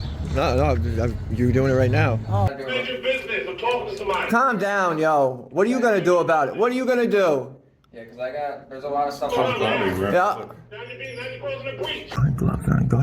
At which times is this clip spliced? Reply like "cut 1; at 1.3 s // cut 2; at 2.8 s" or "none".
cut 1; at 2.5 s // cut 2; at 12.1 s